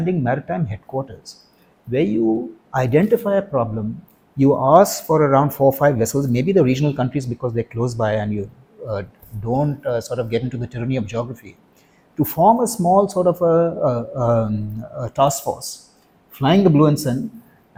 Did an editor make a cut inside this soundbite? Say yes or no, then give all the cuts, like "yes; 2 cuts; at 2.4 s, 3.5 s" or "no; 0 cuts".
no; 0 cuts